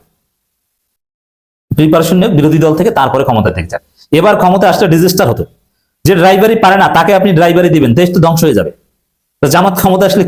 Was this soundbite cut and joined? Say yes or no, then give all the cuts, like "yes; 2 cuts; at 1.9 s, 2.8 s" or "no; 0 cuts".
no; 0 cuts